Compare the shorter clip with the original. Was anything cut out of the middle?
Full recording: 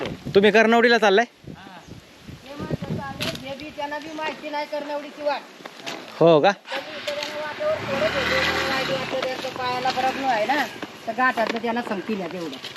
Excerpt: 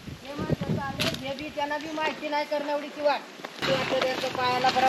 yes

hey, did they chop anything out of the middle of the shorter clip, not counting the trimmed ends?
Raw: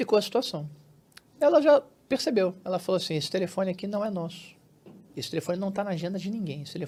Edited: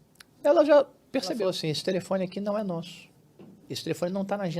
yes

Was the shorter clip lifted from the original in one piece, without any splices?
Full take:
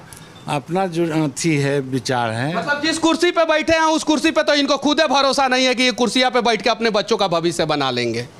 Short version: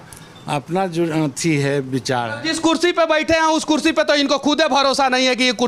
no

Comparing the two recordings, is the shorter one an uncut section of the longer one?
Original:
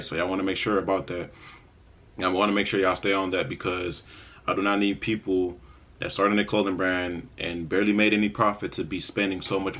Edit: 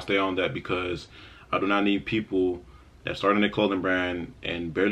yes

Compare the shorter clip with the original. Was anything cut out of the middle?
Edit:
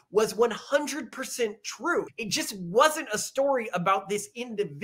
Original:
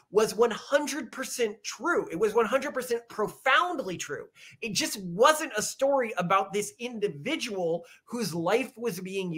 yes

